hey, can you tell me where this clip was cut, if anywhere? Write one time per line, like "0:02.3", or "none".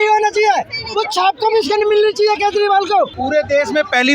0:03.1